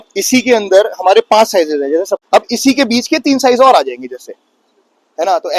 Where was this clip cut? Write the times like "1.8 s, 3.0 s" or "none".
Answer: 2.2 s